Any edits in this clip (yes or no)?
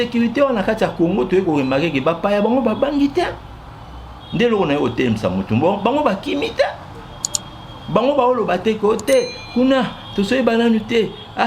no